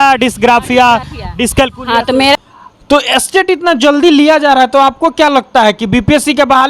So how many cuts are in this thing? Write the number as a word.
one